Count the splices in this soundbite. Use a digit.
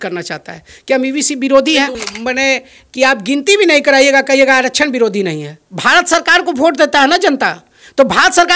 1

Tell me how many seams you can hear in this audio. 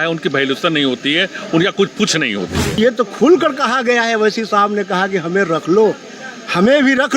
1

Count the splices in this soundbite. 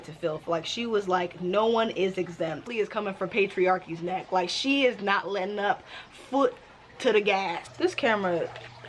2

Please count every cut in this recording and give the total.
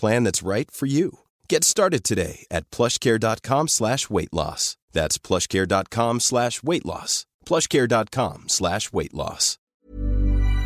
1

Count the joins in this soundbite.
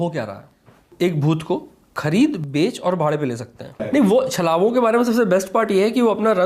2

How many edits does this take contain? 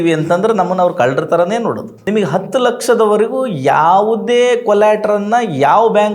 1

